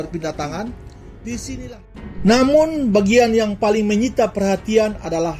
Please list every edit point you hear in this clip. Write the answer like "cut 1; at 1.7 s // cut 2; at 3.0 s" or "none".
cut 1; at 1.6 s